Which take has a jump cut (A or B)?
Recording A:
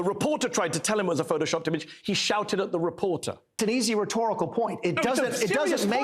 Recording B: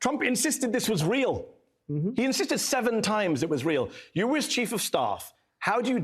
A